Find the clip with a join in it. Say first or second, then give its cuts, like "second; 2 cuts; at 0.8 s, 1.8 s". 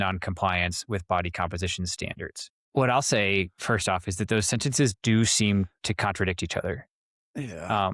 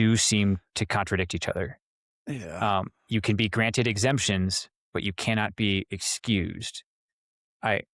first; 1 cut; at 2.7 s